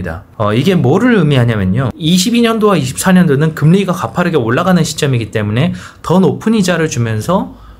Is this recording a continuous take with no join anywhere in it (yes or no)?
no